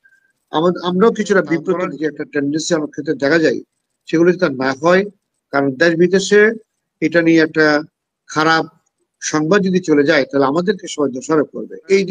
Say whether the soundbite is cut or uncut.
cut